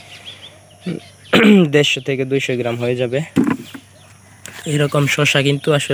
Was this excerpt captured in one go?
yes; 0 cuts

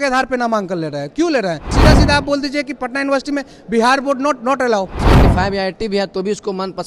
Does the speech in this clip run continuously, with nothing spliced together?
no; 2 cuts; at 1.7 s, 5.0 s

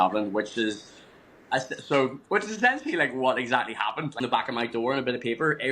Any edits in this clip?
yes; 1 cut; at 4.1 s

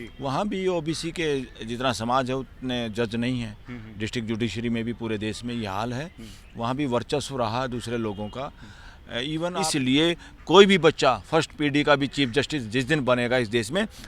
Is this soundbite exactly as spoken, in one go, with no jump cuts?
no; 1 cut; at 9.5 s

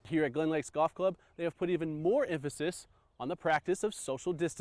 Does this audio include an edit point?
no; 0 cuts

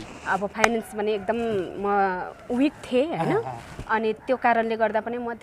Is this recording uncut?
yes; 0 cuts

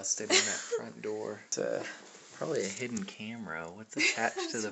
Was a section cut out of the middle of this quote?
yes; 1 cut; at 1.4 s

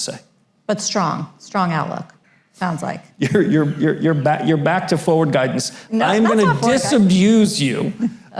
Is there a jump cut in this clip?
no; 0 cuts

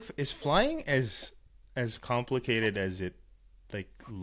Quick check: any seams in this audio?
no; 0 cuts

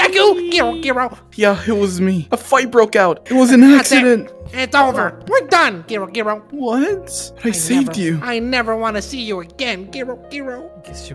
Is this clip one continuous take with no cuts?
no; 1 cut; at 3.2 s

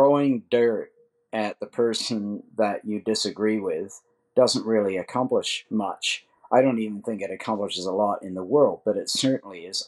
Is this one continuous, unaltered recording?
yes; 0 cuts

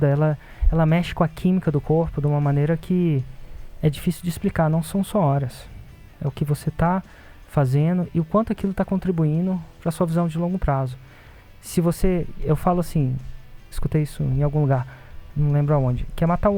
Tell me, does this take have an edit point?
no; 0 cuts

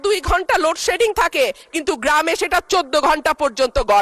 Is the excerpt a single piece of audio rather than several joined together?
yes; 0 cuts

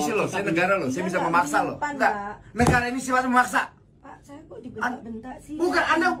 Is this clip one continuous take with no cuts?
yes; 0 cuts

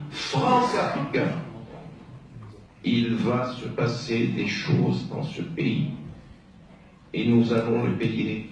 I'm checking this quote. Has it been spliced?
no; 0 cuts

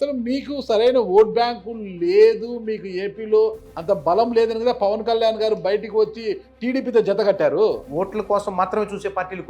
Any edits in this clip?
yes; 1 cut; at 7.9 s

